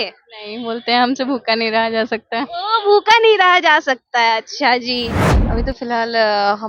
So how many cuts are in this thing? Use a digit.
1